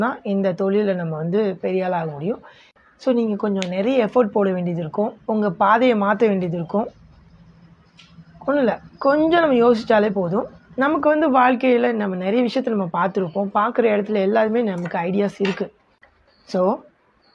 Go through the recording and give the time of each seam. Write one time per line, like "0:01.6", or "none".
none